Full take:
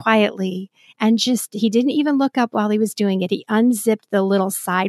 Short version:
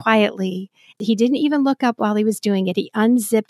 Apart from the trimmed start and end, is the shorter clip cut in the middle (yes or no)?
yes